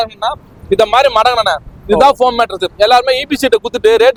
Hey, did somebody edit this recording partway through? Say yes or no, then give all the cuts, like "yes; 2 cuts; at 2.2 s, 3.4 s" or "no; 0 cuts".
no; 0 cuts